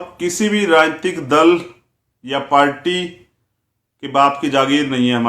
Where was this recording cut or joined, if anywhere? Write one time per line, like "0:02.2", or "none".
none